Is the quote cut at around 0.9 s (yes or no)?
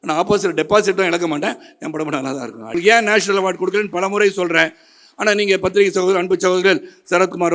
no